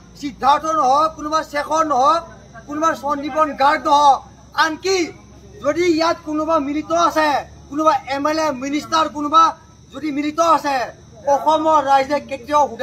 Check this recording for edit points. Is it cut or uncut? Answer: uncut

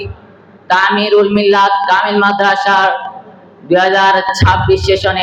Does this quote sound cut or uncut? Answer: uncut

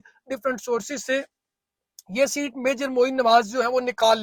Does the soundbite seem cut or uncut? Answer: uncut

